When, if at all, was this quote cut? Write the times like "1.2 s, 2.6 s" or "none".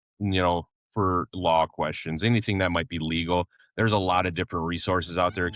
3.6 s

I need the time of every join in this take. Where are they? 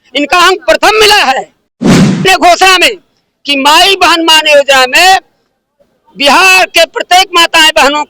2.1 s

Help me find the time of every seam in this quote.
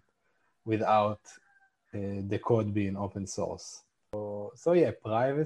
4.2 s

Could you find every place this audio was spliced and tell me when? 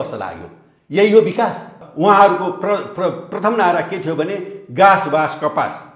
1.8 s

